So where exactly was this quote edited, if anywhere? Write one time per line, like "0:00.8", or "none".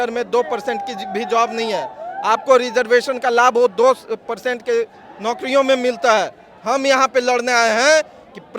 none